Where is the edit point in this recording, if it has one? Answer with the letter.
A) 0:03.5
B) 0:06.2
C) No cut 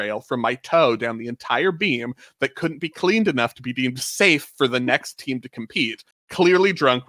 B